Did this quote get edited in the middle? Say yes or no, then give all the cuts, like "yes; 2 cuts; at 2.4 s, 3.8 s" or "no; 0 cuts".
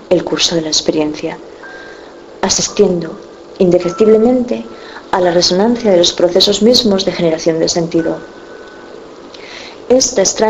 yes; 1 cut; at 6.0 s